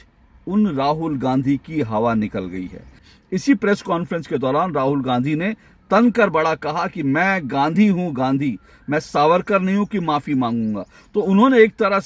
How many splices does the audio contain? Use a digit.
1